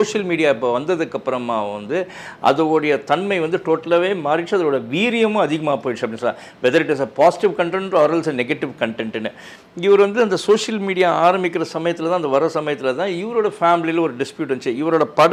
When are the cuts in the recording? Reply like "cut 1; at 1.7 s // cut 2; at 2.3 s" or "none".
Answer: none